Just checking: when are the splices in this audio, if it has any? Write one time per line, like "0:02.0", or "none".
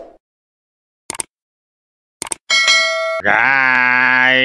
0:03.2